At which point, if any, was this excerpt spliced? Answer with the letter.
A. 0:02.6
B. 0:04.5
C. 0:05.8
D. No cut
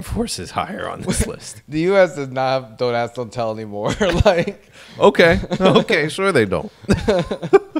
D